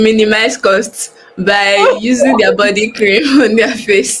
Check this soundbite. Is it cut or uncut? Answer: uncut